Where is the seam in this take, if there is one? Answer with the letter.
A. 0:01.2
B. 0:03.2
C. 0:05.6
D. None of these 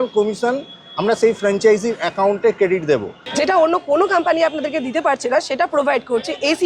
B